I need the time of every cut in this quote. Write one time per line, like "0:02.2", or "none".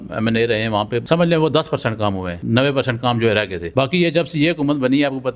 0:01.0
0:02.3
0:03.6